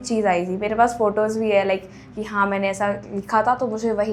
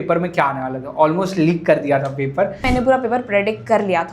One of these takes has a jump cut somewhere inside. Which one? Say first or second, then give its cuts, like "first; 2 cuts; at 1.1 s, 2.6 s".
second; 1 cut; at 2.7 s